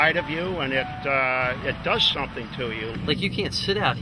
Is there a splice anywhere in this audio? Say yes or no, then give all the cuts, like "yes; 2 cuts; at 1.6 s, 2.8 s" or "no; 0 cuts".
yes; 1 cut; at 3.0 s